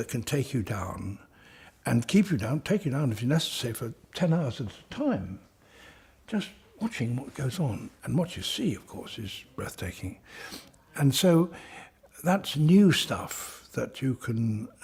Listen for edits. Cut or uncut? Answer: uncut